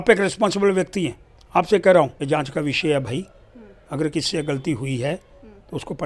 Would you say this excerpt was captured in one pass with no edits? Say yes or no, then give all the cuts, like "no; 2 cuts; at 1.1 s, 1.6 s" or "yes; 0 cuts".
no; 1 cut; at 2.2 s